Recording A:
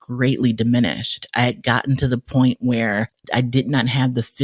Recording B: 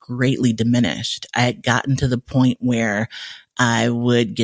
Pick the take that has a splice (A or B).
A